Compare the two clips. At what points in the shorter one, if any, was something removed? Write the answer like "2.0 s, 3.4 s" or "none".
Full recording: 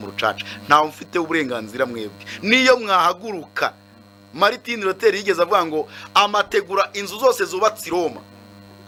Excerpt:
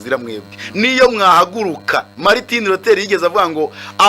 2.1 s